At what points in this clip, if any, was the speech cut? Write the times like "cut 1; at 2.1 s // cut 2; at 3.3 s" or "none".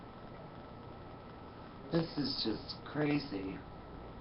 cut 1; at 3.0 s

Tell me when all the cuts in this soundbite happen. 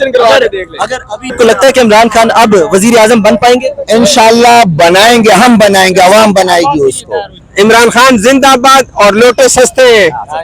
cut 1; at 1.3 s // cut 2; at 7.3 s

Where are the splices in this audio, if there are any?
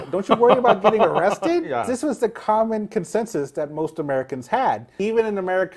cut 1; at 1.9 s // cut 2; at 4.9 s

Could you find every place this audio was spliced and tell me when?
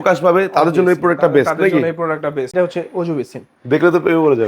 cut 1; at 2.5 s

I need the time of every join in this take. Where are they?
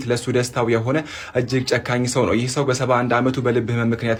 none

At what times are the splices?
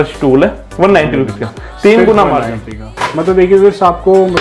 none

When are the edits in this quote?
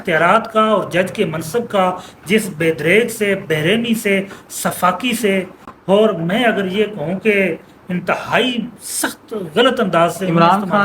none

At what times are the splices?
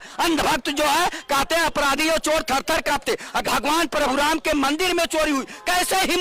cut 1; at 3.4 s

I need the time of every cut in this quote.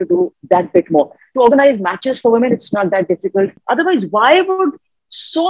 cut 1; at 3.6 s

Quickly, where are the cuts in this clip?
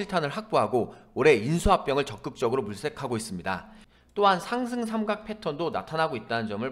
cut 1; at 3.8 s

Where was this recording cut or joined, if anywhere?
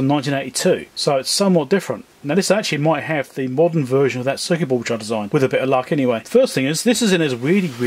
cut 1; at 0.9 s // cut 2; at 5.3 s // cut 3; at 6.2 s

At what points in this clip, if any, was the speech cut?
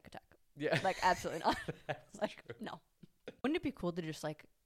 cut 1; at 3.4 s

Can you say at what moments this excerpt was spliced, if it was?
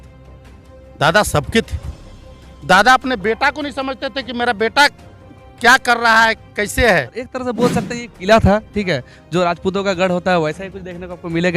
cut 1; at 7.4 s

